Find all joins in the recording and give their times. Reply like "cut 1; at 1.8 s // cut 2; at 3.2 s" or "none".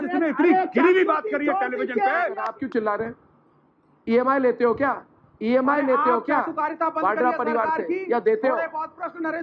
cut 1; at 2.5 s

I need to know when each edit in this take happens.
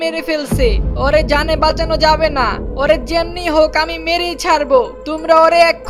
none

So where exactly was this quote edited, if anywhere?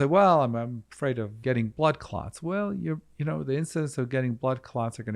cut 1; at 1.4 s

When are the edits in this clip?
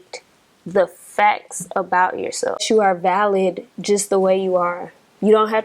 cut 1; at 2.6 s

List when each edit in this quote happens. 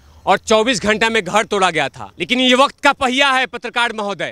cut 1; at 2.1 s

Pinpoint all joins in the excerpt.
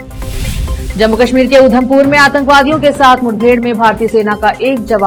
none

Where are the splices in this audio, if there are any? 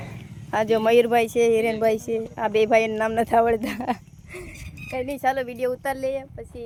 none

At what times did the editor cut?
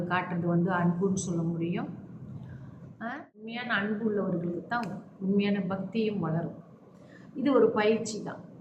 cut 1; at 3.5 s

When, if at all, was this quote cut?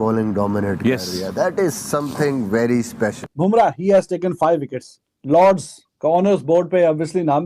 cut 1; at 3.2 s

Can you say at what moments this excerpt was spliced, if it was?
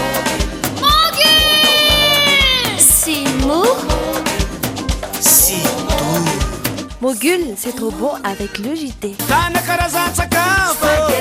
none

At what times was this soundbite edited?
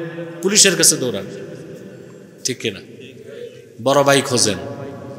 none

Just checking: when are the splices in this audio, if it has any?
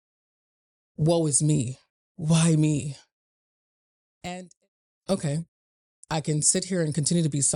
cut 1; at 4.5 s

